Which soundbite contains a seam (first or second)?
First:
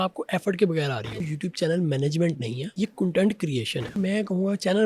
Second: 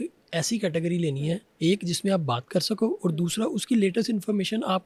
first